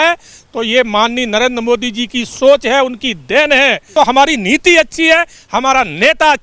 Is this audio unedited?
no; 1 cut; at 3.8 s

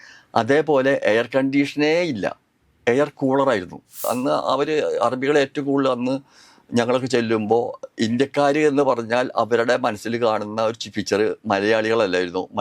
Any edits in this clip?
yes; 1 cut; at 4.0 s

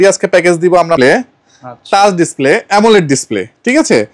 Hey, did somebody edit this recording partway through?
yes; 1 cut; at 1.0 s

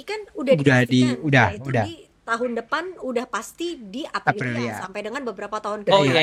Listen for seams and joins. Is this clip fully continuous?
yes; 0 cuts

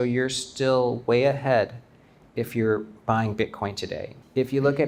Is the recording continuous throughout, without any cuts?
yes; 0 cuts

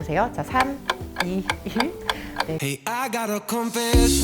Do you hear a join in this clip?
yes; 1 cut; at 2.6 s

